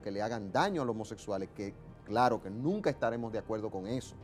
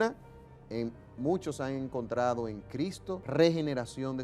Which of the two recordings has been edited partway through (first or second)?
second